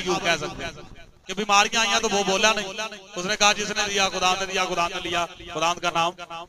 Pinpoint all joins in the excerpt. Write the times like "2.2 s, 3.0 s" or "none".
none